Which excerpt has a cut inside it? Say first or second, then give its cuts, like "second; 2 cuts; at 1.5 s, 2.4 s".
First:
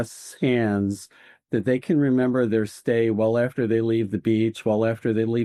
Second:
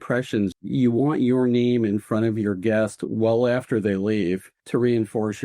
second; 1 cut; at 4.5 s